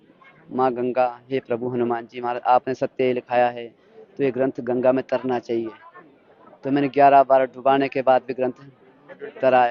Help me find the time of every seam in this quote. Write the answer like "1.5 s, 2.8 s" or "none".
none